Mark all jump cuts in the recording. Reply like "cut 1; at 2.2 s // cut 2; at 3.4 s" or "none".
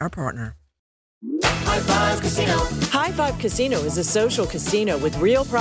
cut 1; at 1.0 s